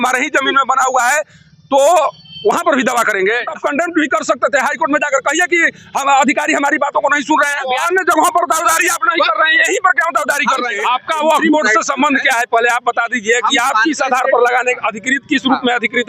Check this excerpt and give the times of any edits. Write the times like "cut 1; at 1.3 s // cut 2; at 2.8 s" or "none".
cut 1; at 3.5 s // cut 2; at 7.6 s // cut 3; at 10.7 s